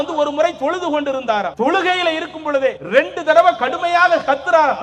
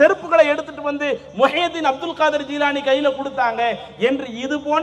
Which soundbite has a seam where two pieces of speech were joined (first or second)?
first